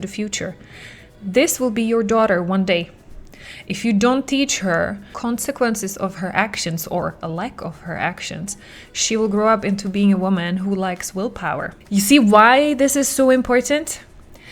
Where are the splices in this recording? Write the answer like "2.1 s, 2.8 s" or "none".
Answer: 5.2 s, 11.8 s